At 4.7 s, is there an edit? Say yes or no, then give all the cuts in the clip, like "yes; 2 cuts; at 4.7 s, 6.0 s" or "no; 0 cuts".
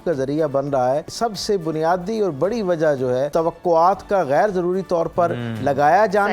no; 2 cuts; at 1.1 s, 3.3 s